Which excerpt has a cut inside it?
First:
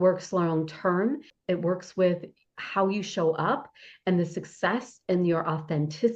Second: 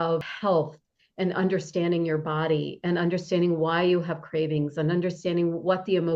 first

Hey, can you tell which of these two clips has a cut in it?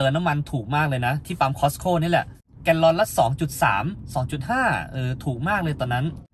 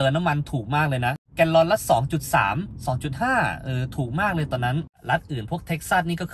second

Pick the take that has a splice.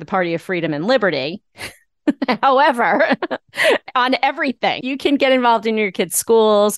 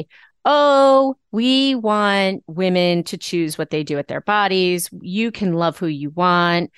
first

